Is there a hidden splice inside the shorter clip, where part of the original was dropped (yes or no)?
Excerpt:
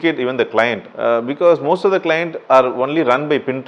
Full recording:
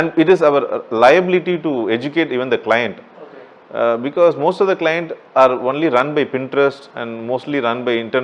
yes